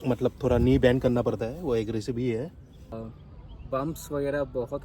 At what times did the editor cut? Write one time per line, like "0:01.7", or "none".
0:03.0